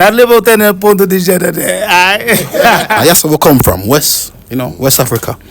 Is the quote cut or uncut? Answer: cut